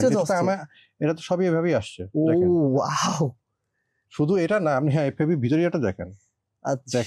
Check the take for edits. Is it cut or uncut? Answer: uncut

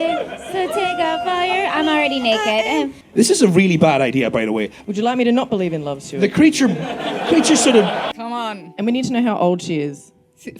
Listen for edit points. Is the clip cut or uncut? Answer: cut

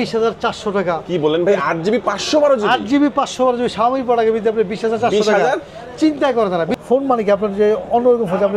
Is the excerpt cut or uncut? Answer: cut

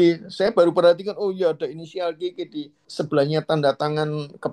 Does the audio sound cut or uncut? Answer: cut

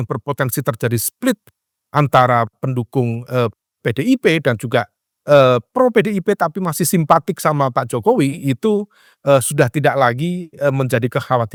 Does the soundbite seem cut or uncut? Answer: uncut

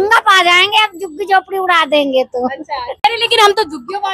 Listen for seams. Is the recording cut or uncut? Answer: uncut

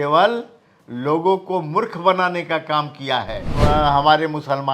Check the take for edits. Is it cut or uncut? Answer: cut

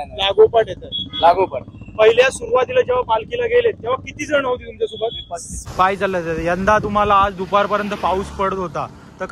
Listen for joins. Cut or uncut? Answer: cut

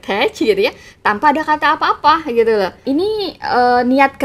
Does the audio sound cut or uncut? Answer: cut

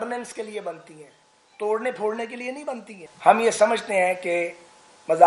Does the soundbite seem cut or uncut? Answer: cut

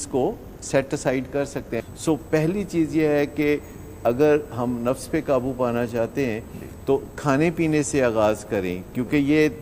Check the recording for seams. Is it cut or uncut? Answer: cut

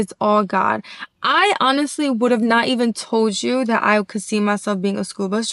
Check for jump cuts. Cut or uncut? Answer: uncut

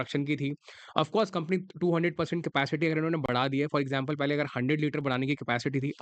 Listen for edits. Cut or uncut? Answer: uncut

